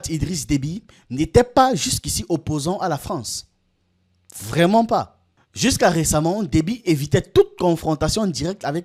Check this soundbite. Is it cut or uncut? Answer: uncut